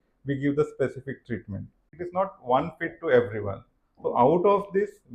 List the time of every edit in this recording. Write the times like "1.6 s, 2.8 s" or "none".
1.9 s